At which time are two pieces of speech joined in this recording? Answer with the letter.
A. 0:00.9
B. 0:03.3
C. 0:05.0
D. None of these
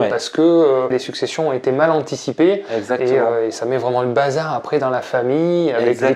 A